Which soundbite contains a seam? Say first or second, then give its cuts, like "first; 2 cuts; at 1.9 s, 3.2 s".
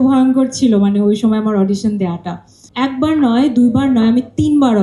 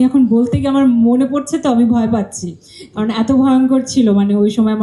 first; 1 cut; at 2.6 s